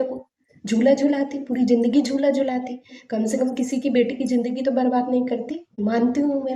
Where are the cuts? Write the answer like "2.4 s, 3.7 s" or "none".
5.6 s